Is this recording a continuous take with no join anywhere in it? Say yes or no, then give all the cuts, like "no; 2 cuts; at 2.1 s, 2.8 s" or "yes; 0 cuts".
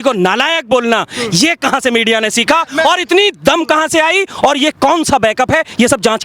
yes; 0 cuts